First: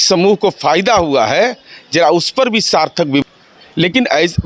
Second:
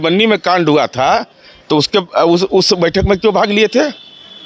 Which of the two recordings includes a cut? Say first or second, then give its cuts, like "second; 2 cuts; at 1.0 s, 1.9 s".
first; 1 cut; at 3.2 s